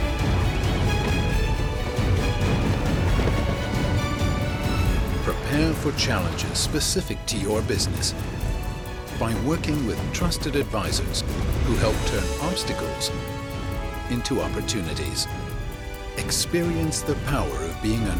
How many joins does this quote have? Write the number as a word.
zero